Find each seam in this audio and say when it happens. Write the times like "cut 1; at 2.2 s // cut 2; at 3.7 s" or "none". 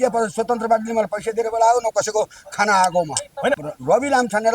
cut 1; at 3.6 s